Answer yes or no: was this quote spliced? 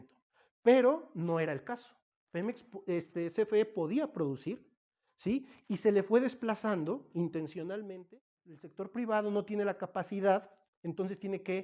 yes